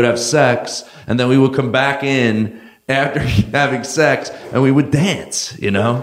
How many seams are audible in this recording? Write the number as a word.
one